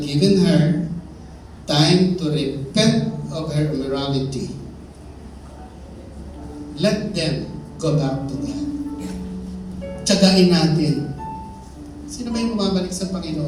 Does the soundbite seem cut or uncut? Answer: uncut